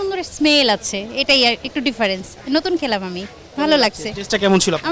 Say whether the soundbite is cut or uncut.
uncut